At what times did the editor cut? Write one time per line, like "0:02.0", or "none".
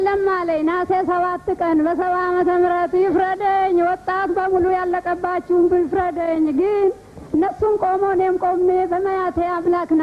none